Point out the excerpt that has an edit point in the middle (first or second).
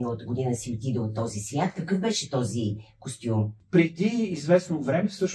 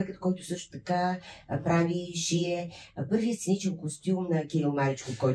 first